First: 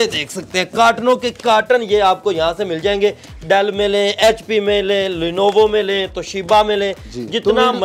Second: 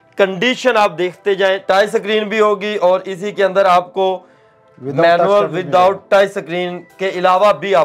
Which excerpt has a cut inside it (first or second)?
second